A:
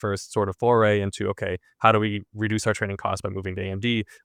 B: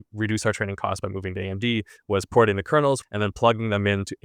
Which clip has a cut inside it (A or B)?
B